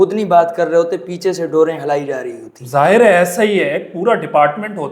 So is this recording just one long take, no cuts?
yes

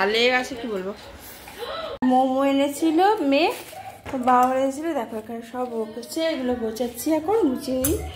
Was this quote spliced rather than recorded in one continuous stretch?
yes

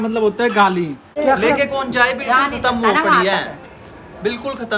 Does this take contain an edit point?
yes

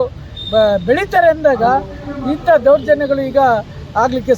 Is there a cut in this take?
no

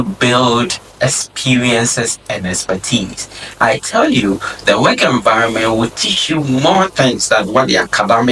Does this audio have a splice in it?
no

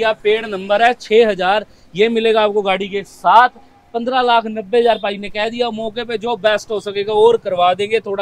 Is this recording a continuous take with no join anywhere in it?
yes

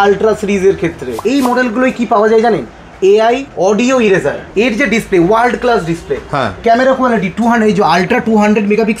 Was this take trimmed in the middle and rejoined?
yes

